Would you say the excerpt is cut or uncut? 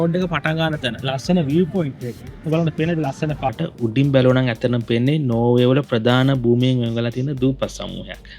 cut